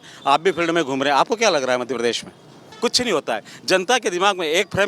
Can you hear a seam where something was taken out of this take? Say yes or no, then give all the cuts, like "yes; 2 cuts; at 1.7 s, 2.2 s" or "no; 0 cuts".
yes; 1 cut; at 2.6 s